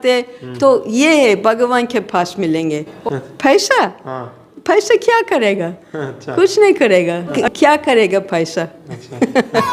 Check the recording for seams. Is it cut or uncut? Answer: cut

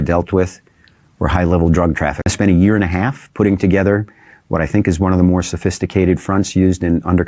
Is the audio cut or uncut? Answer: cut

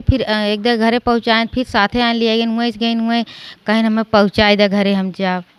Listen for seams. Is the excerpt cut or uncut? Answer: uncut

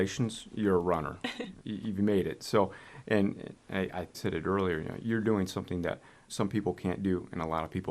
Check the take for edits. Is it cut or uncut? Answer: uncut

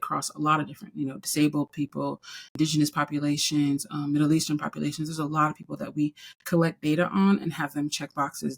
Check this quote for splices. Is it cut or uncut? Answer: cut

